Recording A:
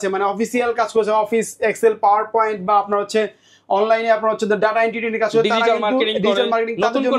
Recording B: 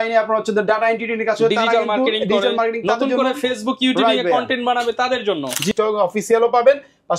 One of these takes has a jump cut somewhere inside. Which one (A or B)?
B